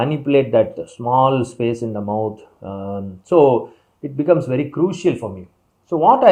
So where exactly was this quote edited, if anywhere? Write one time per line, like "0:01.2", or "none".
none